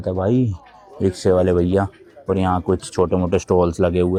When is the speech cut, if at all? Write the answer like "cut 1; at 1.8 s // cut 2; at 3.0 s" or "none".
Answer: none